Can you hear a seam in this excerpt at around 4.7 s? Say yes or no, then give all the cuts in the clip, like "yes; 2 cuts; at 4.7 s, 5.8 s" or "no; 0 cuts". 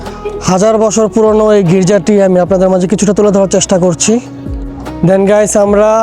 yes; 1 cut; at 4.7 s